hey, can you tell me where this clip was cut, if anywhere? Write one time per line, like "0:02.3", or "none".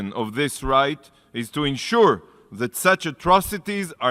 none